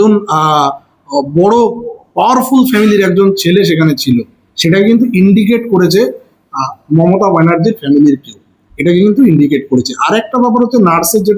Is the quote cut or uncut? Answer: uncut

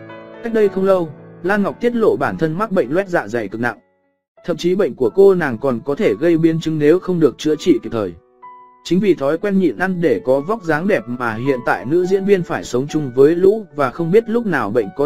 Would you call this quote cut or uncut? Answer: uncut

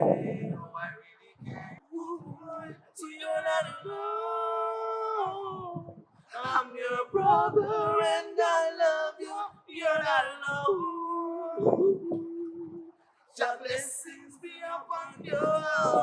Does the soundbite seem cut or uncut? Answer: cut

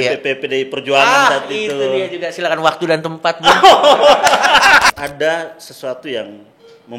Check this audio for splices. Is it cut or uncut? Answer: cut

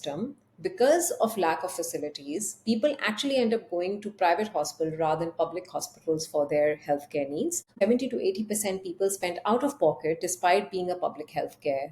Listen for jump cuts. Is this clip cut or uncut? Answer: cut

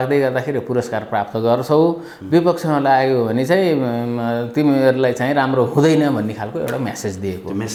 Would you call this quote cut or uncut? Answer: uncut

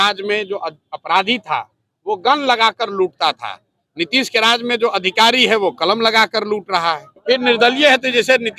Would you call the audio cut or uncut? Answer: cut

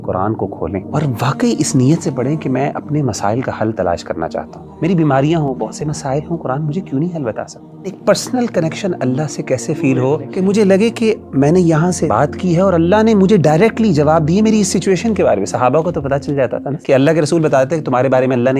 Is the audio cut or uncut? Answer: cut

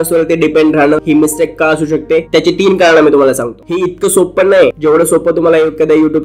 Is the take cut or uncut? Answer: cut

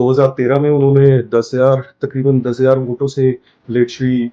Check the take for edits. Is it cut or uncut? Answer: uncut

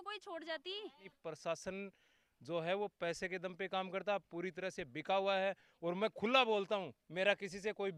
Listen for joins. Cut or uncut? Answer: cut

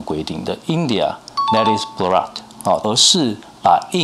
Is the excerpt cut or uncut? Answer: cut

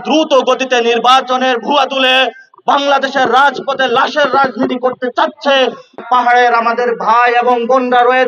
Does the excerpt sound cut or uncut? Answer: cut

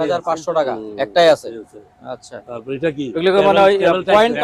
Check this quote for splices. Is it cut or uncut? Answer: uncut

